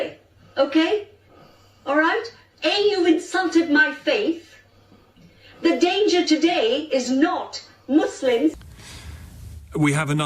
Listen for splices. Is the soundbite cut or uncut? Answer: cut